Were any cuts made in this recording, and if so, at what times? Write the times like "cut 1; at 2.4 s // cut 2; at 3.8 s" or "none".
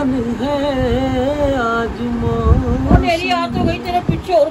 cut 1; at 3.0 s